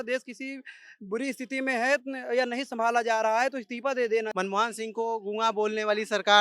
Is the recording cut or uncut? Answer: cut